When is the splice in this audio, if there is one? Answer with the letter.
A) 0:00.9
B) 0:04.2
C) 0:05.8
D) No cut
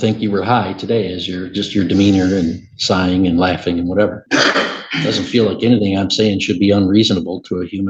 B